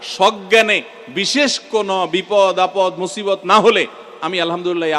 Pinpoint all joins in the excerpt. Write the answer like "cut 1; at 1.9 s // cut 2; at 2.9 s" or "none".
none